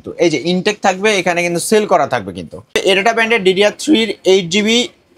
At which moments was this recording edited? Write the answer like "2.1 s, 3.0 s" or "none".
2.8 s